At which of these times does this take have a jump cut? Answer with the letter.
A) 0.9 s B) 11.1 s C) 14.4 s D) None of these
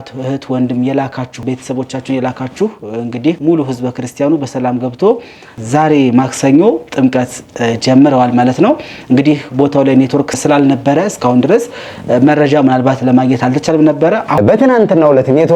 C